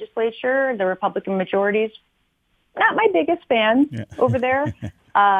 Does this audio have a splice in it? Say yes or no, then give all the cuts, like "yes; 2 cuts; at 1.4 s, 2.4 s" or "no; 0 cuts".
no; 0 cuts